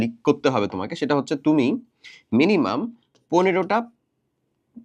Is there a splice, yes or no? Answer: no